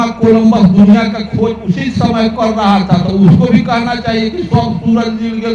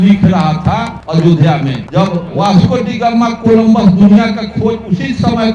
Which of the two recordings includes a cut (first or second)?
second